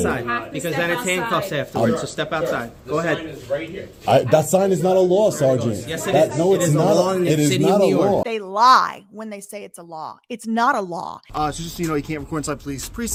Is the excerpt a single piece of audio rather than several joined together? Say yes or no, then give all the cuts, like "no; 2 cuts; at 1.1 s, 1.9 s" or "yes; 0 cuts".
yes; 0 cuts